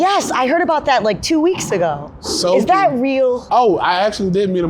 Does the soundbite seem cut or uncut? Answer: cut